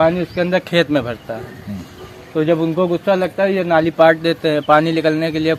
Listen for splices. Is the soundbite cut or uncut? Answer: uncut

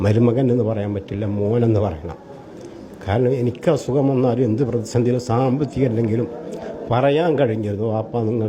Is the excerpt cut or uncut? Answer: uncut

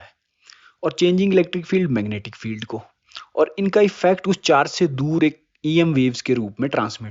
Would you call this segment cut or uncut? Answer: uncut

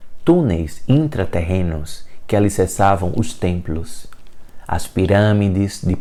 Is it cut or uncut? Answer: uncut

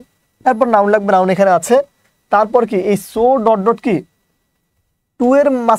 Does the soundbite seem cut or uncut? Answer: uncut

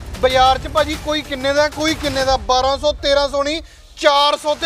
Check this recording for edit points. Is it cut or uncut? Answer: uncut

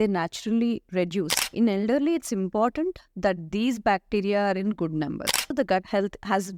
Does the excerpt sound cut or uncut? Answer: cut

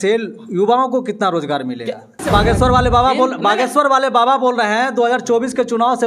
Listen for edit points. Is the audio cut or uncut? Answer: cut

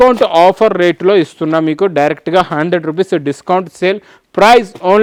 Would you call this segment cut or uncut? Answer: uncut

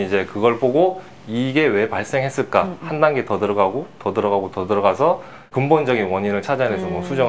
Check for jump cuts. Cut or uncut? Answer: uncut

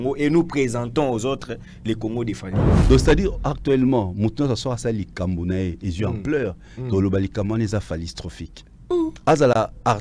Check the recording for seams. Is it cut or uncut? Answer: cut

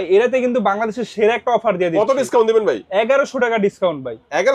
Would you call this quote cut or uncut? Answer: uncut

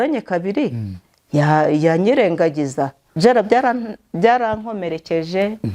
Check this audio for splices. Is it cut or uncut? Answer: cut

